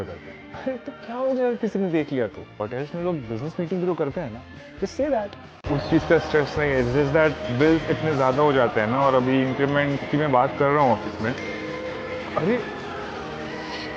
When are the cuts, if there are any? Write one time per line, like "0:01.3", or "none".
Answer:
0:08.8
0:13.2